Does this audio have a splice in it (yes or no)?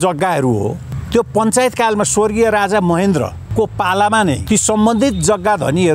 yes